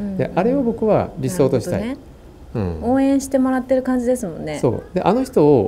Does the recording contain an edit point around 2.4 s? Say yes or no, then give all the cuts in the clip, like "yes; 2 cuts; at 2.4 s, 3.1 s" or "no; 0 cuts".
no; 0 cuts